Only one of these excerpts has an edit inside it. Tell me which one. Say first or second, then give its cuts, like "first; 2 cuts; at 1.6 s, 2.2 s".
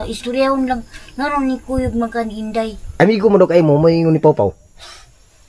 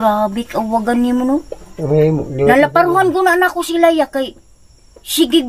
first; 1 cut; at 2.9 s